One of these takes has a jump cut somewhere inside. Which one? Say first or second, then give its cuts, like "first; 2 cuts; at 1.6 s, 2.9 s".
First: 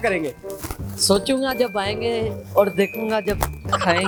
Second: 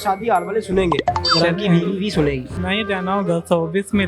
second; 1 cut; at 2.6 s